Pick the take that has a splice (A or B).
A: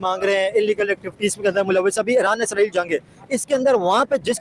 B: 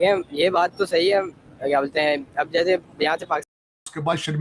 B